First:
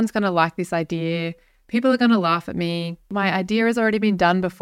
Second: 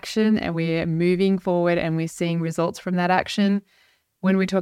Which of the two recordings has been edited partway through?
first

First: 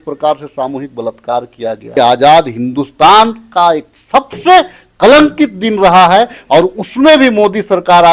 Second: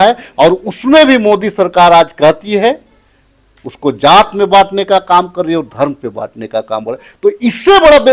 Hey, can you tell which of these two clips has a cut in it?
first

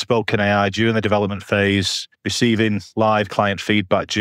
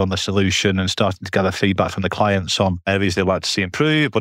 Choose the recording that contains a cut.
second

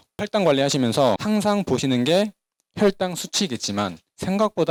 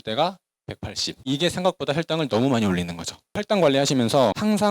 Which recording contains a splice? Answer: second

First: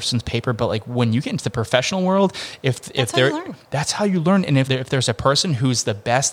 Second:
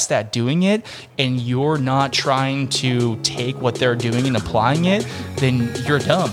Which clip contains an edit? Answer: first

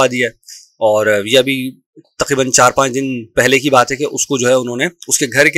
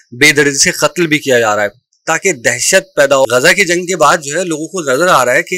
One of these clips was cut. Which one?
second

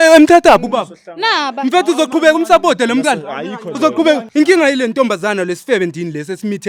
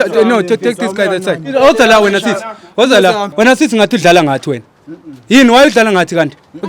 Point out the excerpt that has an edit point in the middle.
second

